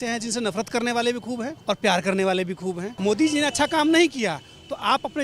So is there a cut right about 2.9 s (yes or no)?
yes